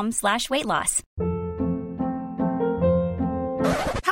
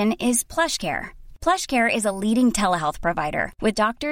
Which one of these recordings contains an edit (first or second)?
first